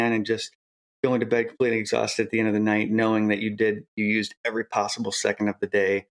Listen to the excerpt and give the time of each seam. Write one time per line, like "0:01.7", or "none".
none